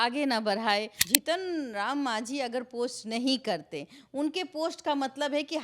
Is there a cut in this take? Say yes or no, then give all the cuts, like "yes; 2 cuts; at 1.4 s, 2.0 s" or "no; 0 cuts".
yes; 1 cut; at 1.0 s